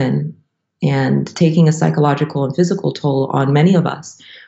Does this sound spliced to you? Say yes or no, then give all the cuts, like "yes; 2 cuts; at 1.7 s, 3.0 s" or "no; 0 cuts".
yes; 1 cut; at 1.3 s